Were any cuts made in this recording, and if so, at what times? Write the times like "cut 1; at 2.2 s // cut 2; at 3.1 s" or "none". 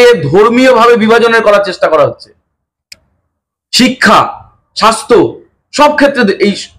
none